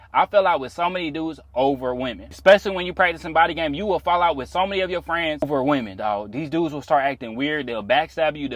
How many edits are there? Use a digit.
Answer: 2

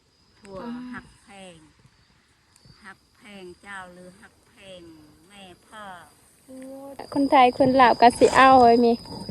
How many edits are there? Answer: 1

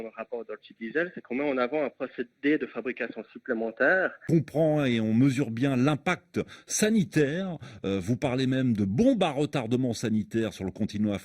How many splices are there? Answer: 1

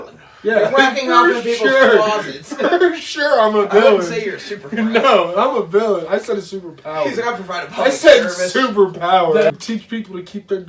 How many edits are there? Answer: 1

